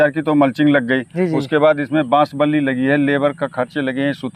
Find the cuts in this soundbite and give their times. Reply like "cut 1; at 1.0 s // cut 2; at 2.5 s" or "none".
none

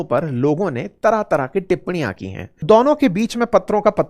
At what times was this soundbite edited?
cut 1; at 2.6 s

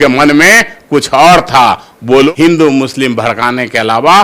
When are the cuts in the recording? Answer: cut 1; at 2.3 s

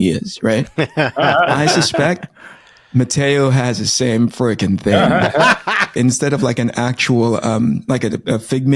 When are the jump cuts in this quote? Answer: cut 1; at 5.9 s

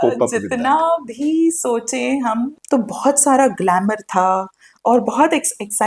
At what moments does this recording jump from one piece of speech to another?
cut 1; at 2.6 s

